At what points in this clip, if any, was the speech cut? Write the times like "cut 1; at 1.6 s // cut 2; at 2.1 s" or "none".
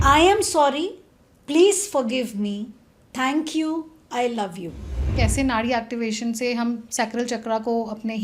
cut 1; at 5.1 s